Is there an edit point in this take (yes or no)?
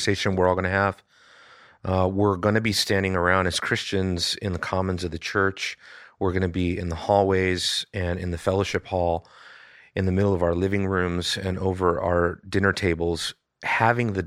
no